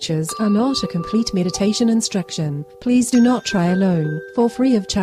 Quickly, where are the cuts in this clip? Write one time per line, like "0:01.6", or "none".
none